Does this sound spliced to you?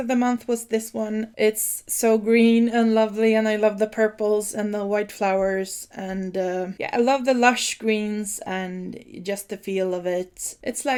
no; 0 cuts

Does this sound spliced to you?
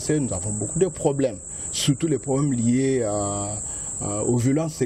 no; 0 cuts

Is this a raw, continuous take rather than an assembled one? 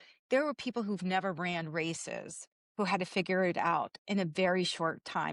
yes; 0 cuts

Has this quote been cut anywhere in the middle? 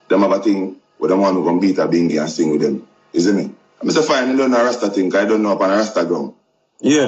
no; 0 cuts

